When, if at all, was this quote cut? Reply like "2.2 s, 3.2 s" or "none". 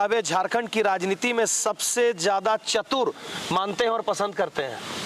none